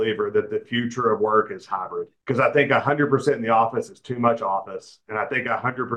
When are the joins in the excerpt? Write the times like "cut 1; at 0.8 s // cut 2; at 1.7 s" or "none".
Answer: cut 1; at 2.1 s